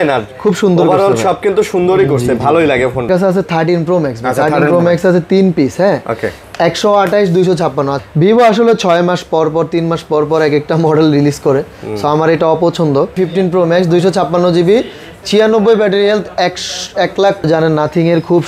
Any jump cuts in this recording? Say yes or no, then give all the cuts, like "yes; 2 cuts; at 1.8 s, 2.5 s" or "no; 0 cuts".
yes; 4 cuts; at 3.1 s, 8.0 s, 13.1 s, 17.4 s